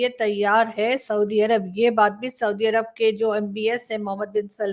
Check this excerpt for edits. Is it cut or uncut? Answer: uncut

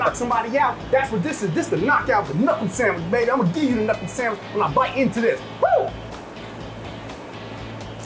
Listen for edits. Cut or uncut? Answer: uncut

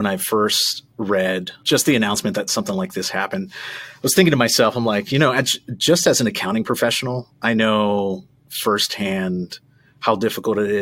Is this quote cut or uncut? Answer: cut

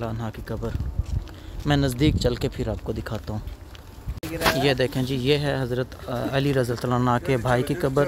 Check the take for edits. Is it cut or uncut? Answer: cut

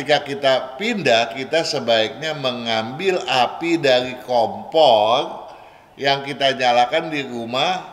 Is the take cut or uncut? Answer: uncut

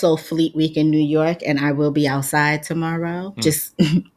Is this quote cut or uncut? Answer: uncut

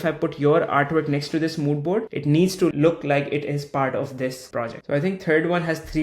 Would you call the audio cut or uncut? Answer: cut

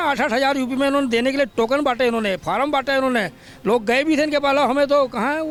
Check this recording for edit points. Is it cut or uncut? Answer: uncut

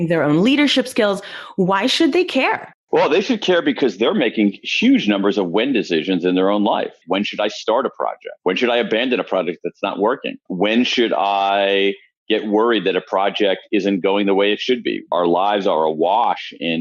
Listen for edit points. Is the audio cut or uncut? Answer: cut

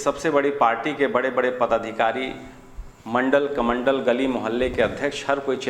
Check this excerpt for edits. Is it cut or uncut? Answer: uncut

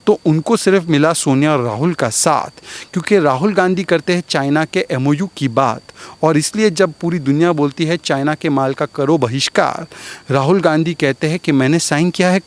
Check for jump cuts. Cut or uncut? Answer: uncut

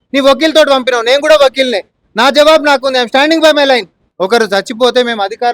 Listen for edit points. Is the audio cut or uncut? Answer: cut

